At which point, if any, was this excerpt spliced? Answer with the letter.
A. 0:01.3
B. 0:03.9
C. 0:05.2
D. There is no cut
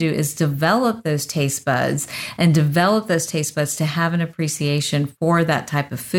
D